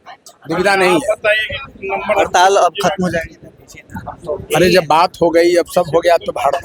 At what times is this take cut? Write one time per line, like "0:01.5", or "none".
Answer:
none